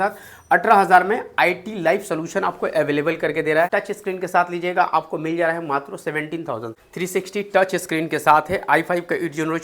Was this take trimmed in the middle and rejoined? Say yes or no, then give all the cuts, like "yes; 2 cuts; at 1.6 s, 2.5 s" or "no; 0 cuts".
yes; 2 cuts; at 3.7 s, 6.7 s